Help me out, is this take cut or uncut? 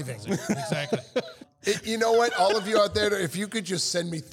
cut